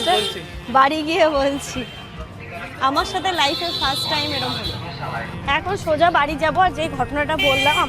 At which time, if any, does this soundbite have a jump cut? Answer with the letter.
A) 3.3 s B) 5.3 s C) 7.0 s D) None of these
B